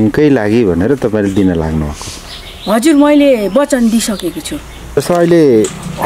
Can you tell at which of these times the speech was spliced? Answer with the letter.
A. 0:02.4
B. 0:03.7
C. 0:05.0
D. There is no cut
C